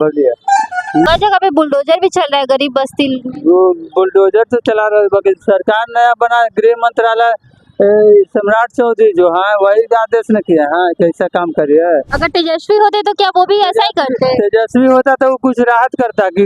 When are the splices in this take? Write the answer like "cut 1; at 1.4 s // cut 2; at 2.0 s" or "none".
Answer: cut 1; at 1.1 s // cut 2; at 12.2 s